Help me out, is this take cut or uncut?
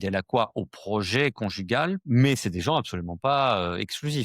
cut